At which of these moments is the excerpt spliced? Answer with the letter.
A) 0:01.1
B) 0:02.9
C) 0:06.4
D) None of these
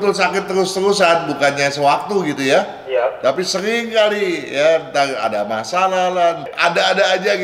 C